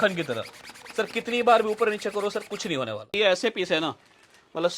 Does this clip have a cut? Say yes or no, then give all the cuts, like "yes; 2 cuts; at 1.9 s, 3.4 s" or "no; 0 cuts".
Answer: yes; 1 cut; at 3.1 s